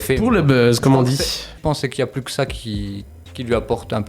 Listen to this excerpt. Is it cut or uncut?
cut